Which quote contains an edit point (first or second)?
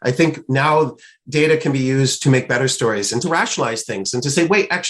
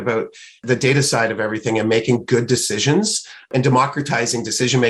first